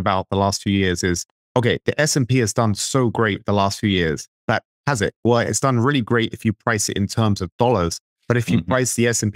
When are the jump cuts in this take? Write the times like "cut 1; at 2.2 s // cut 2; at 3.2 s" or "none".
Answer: cut 1; at 1.3 s // cut 2; at 4.5 s

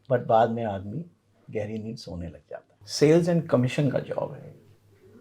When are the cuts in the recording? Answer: cut 1; at 2.8 s

